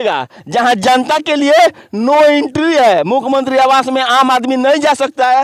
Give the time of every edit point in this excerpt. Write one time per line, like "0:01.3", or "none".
none